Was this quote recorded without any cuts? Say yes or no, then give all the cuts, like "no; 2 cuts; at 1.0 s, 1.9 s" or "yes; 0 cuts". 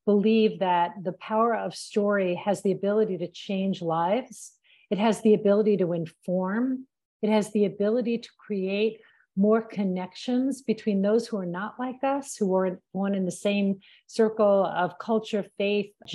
yes; 0 cuts